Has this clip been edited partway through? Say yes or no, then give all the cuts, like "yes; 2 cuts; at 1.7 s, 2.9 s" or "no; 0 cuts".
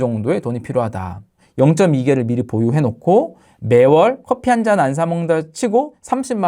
yes; 2 cuts; at 1.3 s, 4.2 s